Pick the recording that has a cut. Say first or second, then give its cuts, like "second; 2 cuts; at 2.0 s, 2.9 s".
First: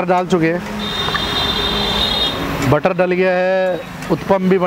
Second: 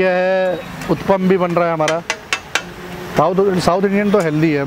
second; 1 cut; at 3.1 s